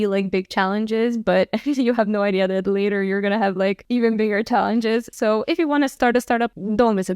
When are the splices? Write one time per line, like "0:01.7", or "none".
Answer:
0:05.9

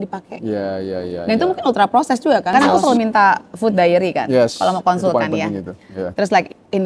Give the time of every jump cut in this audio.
0:02.5

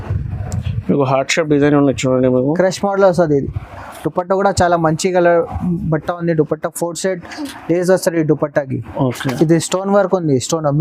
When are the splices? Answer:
none

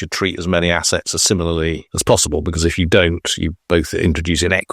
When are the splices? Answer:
0:01.9

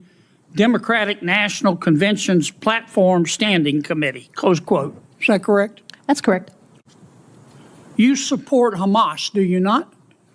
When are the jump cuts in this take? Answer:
0:06.7

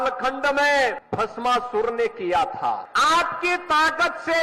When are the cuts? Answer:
0:01.0
0:02.9

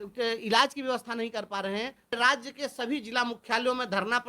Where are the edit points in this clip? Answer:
0:02.2

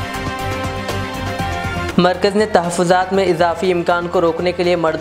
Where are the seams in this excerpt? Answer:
0:01.9

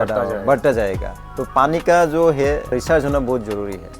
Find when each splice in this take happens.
0:02.7

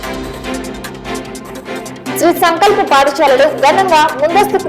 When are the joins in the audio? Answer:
0:01.0
0:02.2

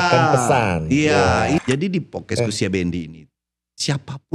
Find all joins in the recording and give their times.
0:01.6

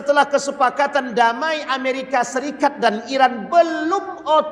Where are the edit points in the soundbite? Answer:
none

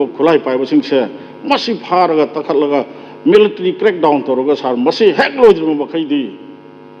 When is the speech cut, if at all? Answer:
none

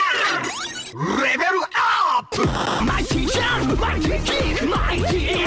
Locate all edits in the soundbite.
0:02.5

